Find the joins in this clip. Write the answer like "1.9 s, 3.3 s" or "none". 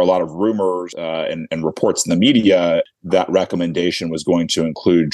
0.9 s, 3.0 s